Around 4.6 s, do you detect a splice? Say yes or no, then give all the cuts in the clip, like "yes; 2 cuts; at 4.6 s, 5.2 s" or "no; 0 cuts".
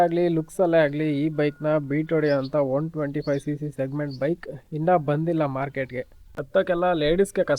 no; 1 cut; at 6.2 s